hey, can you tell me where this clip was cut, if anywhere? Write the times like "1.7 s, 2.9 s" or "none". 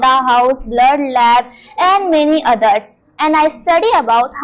none